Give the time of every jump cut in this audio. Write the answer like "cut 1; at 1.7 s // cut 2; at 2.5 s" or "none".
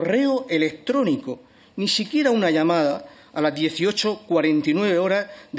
none